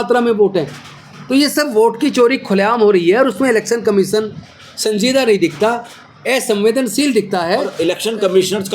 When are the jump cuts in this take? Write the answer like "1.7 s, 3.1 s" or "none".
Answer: 7.7 s